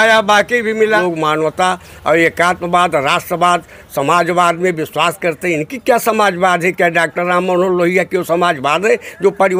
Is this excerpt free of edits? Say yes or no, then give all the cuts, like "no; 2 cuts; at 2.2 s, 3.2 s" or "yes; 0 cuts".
no; 1 cut; at 1.0 s